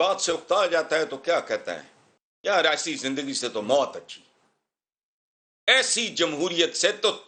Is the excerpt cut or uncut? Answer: uncut